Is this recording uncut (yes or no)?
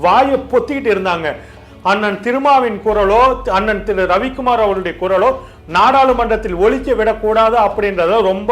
no